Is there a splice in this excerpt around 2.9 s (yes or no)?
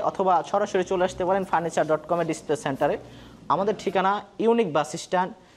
no